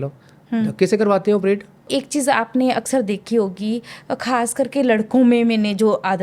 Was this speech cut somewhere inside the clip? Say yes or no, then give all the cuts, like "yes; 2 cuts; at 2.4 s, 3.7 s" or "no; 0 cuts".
yes; 1 cut; at 1.8 s